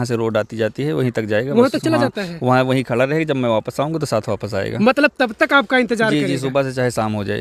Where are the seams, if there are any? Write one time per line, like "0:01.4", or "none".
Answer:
none